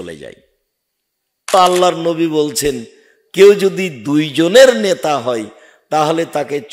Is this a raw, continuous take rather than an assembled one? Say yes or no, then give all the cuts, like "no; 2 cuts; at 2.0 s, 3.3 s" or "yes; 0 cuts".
no; 1 cut; at 1.5 s